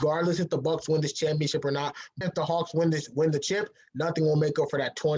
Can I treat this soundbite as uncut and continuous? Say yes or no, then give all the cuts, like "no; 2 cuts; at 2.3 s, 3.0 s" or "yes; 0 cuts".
no; 1 cut; at 2.0 s